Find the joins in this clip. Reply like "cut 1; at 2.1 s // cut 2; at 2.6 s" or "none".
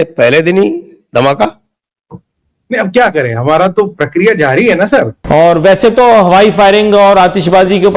cut 1; at 5.2 s